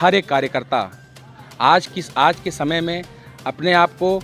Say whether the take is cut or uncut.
uncut